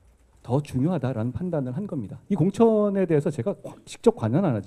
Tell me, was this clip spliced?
yes; 1 cut; at 2.2 s

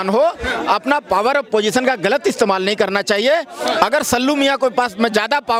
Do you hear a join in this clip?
no; 0 cuts

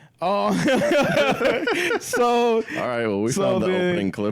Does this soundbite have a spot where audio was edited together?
no; 0 cuts

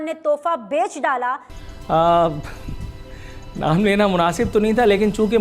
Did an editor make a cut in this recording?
yes; 1 cut; at 1.5 s

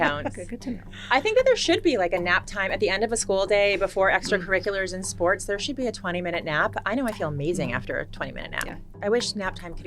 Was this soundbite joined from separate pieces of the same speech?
yes; 1 cut; at 8.8 s

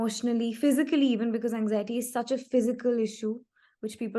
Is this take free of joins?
yes; 0 cuts

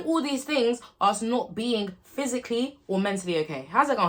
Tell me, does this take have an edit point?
no; 0 cuts

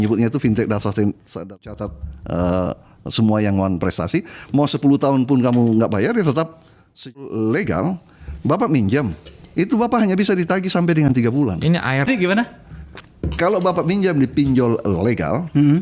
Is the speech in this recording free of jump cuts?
no; 2 cuts; at 1.6 s, 7.1 s

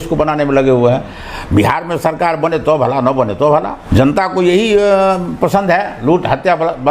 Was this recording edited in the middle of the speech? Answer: yes; 1 cut; at 3.8 s

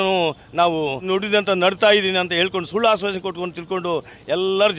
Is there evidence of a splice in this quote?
yes; 1 cut; at 1.0 s

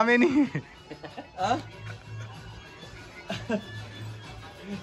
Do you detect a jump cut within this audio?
no; 0 cuts

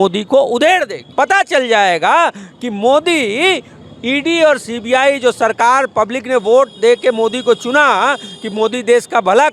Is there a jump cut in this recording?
no; 0 cuts

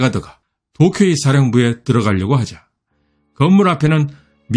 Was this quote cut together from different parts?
no; 0 cuts

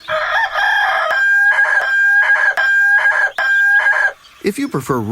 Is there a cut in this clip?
yes; 1 cut; at 1.1 s

